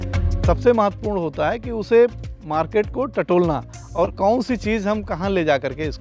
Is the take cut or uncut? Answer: uncut